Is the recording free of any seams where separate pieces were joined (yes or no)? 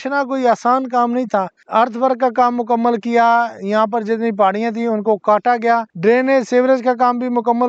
no